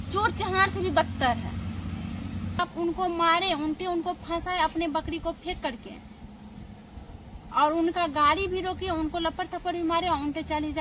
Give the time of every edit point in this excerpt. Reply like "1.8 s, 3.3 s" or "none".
2.6 s